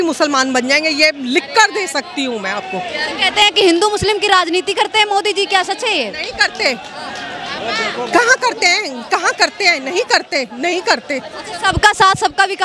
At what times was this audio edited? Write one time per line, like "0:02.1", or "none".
none